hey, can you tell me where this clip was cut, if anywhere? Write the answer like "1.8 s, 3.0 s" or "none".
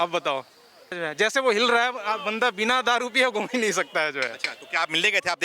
1.0 s